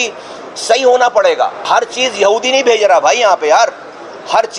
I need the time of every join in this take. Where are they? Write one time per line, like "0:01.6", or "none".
0:01.7